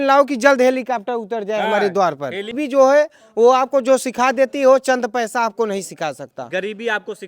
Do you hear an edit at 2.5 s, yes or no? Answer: yes